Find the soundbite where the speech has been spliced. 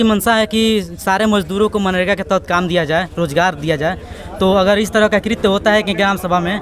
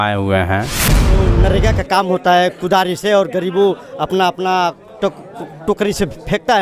second; 1 cut; at 1.2 s

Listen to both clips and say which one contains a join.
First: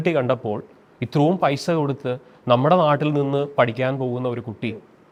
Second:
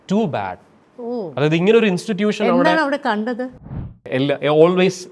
second; 1 cut; at 3.7 s

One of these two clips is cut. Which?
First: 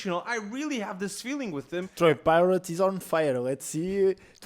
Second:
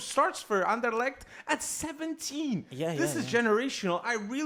first; 1 cut; at 1.8 s

